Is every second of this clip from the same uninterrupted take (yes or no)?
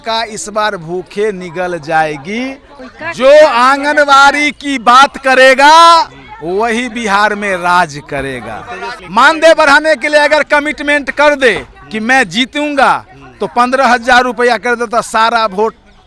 no